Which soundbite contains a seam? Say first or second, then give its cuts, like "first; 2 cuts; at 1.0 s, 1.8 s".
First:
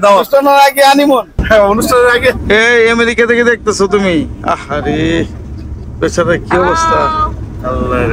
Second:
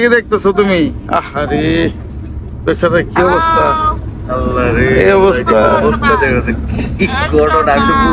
first; 1 cut; at 2.4 s